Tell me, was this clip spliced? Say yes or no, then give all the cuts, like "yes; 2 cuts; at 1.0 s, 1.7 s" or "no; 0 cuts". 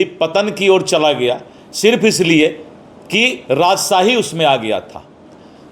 no; 0 cuts